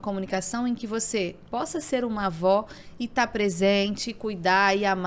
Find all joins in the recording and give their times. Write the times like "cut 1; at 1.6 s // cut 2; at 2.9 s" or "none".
none

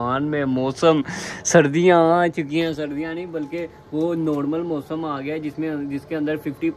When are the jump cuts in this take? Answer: none

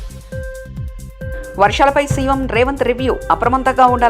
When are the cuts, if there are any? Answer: cut 1; at 1.3 s

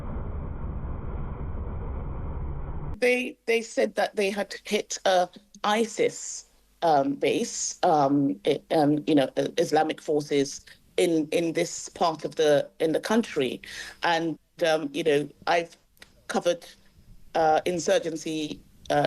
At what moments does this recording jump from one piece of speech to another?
cut 1; at 3.0 s

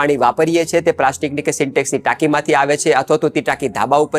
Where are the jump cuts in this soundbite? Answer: none

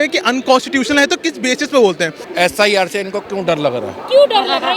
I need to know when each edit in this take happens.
cut 1; at 2.2 s

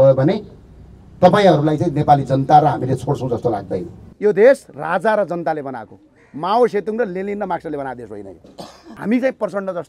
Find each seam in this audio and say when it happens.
cut 1; at 4.0 s // cut 2; at 8.9 s

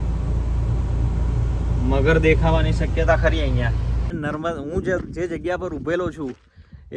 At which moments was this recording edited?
cut 1; at 4.1 s

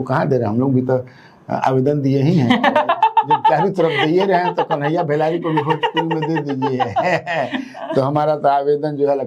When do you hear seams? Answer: none

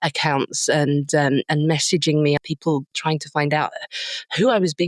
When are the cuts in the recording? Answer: cut 1; at 2.6 s

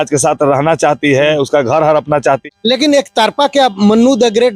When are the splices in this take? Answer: cut 1; at 2.4 s

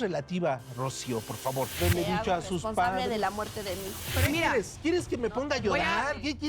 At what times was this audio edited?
cut 1; at 1.8 s // cut 2; at 4.1 s

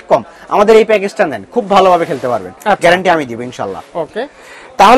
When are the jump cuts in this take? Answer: none

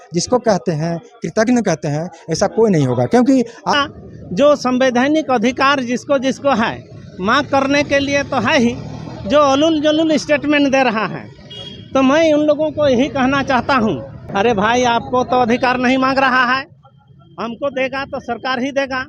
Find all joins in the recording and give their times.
cut 1; at 3.7 s // cut 2; at 14.2 s

